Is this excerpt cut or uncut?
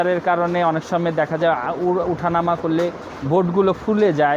uncut